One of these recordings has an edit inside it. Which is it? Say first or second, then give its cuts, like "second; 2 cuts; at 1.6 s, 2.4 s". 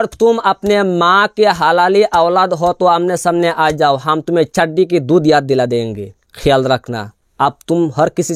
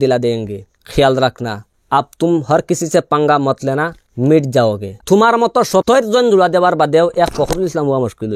second; 1 cut; at 4.9 s